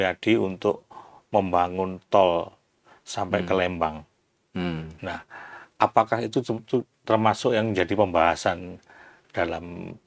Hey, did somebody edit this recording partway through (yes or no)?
no